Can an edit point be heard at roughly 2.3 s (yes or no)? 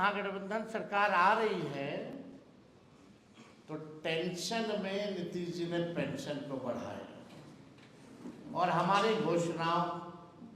no